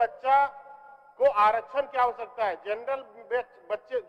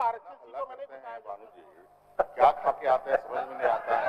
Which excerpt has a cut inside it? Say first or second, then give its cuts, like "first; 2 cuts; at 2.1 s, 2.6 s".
second; 1 cut; at 0.9 s